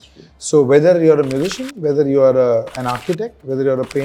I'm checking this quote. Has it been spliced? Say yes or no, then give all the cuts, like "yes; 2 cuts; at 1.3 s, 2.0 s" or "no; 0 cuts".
no; 0 cuts